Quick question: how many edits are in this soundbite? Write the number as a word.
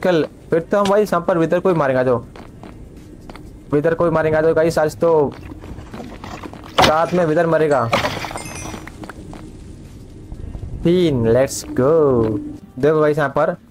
zero